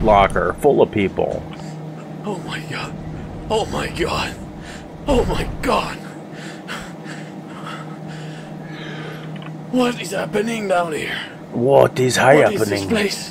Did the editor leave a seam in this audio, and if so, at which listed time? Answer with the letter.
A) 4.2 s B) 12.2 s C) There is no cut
C